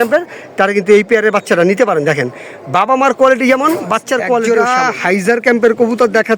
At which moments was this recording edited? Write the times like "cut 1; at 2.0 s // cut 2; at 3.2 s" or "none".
cut 1; at 4.5 s